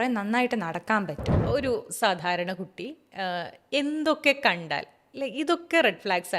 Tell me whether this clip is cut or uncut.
cut